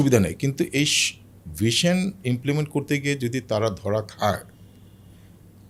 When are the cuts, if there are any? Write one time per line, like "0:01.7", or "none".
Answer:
none